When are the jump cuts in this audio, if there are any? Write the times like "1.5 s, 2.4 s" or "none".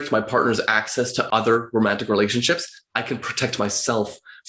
1.2 s